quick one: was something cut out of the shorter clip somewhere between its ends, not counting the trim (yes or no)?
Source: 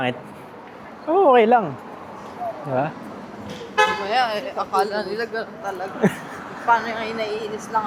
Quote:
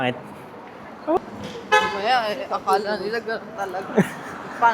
yes